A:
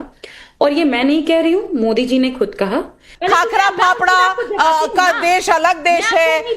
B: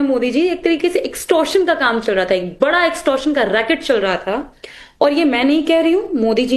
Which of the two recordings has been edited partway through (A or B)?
A